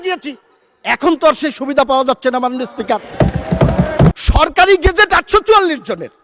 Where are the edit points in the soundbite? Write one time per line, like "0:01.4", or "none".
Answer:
0:04.2